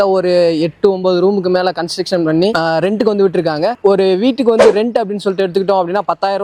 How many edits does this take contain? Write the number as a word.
zero